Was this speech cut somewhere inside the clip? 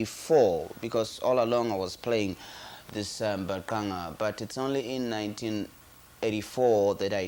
no; 0 cuts

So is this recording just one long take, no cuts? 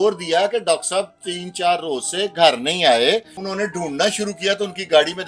no; 1 cut; at 3.4 s

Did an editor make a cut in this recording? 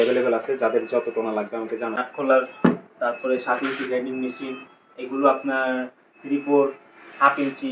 yes; 1 cut; at 2.0 s

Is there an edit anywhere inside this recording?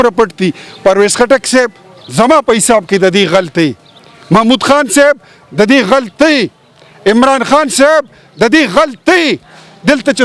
no; 0 cuts

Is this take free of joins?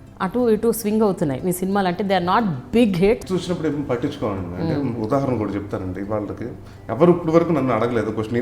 no; 1 cut; at 3.3 s

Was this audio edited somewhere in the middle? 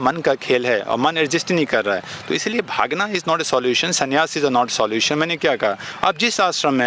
no; 0 cuts

